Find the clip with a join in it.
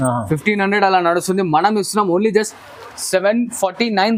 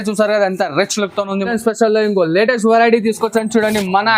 second; 1 cut; at 1.5 s

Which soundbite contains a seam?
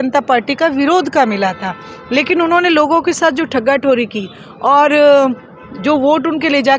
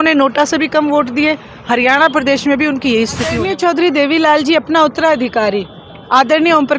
second; 1 cut; at 3.4 s

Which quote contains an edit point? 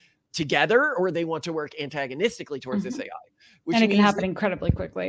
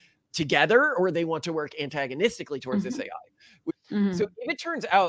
second; 1 cut; at 3.7 s

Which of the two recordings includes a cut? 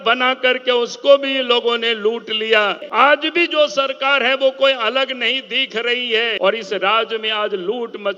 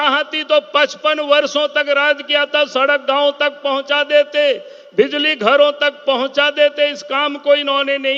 first; 2 cuts; at 2.8 s, 6.4 s

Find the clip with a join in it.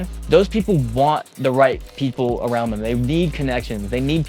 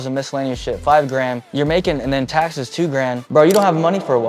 second; 2 cuts; at 1.4 s, 3.2 s

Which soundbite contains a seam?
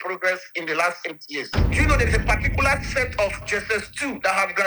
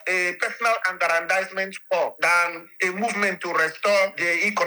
first; 1 cut; at 1.5 s

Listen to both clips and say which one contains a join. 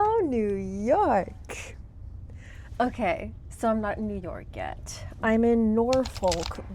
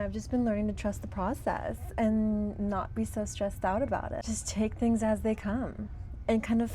second; 1 cut; at 4.2 s

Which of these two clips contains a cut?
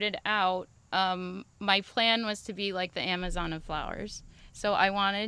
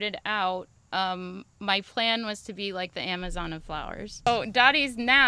second; 1 cut; at 4.3 s

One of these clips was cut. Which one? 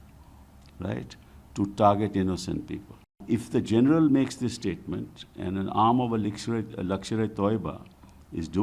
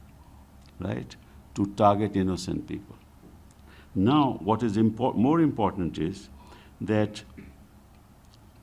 first; 1 cut; at 3.2 s

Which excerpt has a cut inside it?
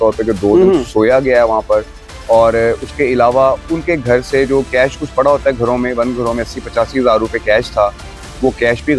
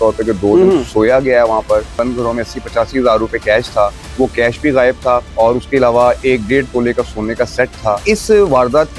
second; 4 cuts; at 1.9 s, 4.0 s, 5.3 s, 8.0 s

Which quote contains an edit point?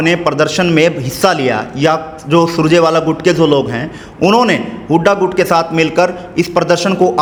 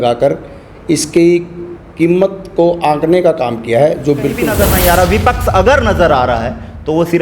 second; 1 cut; at 4.5 s

